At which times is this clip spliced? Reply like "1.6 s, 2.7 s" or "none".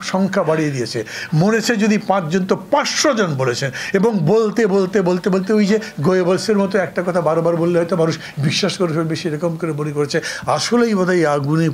none

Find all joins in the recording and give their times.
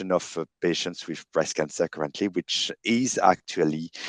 none

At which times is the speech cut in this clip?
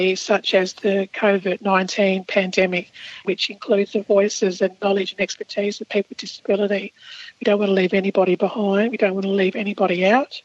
1.1 s, 3.2 s

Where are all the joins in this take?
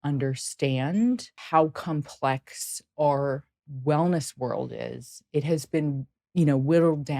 1.3 s

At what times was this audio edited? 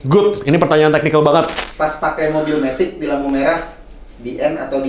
1.7 s

